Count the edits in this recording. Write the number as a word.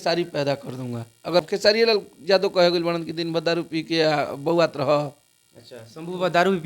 one